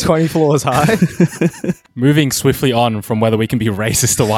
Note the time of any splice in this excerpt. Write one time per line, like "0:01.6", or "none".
0:01.8